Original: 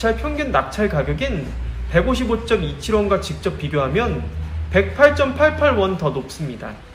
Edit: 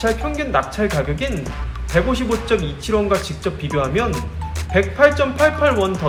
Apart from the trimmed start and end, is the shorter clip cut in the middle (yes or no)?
no